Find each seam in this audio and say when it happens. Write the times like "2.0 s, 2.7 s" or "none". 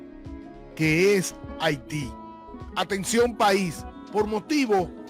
3.9 s